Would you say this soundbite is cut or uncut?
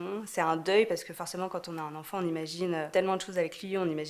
cut